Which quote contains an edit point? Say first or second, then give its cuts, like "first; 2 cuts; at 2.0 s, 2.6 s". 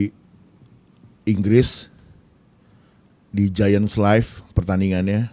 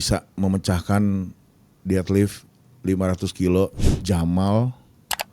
second; 1 cut; at 3.9 s